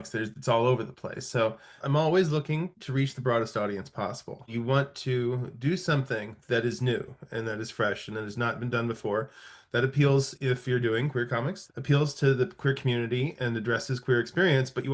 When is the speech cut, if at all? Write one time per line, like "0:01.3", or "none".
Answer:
0:01.8
0:04.5
0:11.6

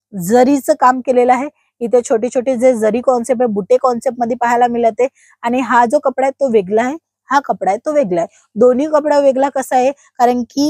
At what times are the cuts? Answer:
none

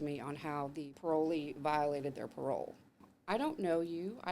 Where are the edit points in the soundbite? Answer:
0:00.9
0:03.1

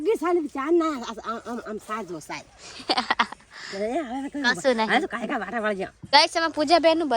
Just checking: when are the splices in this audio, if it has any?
0:06.0

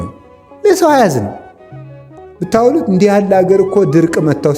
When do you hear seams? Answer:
none

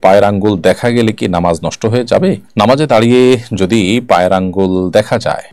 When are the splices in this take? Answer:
none

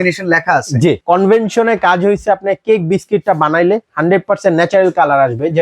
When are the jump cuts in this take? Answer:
0:01.0

